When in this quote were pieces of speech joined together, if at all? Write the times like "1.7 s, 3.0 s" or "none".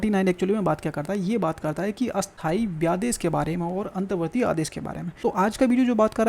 2.3 s, 5.0 s